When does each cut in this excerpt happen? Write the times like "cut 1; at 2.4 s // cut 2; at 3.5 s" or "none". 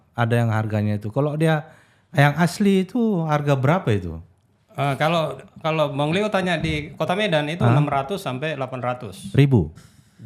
none

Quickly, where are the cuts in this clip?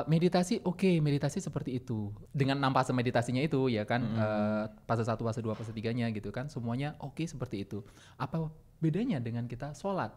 cut 1; at 2.2 s

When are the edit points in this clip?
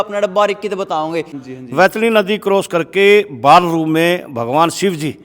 cut 1; at 1.4 s

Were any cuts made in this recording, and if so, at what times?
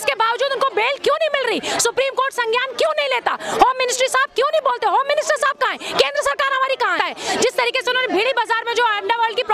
cut 1; at 6.9 s

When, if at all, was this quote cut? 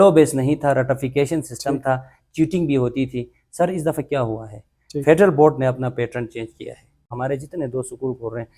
cut 1; at 7.1 s

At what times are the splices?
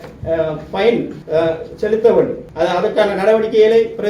cut 1; at 1.2 s // cut 2; at 2.4 s

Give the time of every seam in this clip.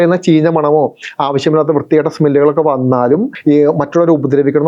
cut 1; at 3.3 s

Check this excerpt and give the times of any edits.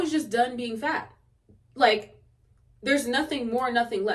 none

